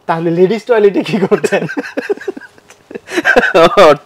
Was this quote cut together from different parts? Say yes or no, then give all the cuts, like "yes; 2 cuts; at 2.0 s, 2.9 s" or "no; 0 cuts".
no; 0 cuts